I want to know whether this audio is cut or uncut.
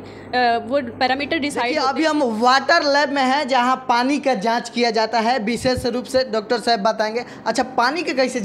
cut